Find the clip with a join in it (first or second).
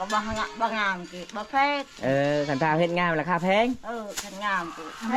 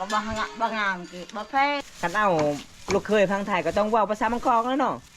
second